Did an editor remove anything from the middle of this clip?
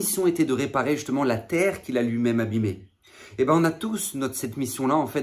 no; 0 cuts

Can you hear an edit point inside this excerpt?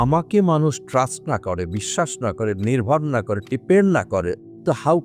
no; 0 cuts

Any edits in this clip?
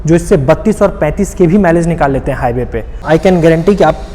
yes; 1 cut; at 3.0 s

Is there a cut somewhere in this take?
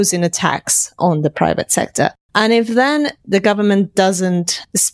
yes; 1 cut; at 2.2 s

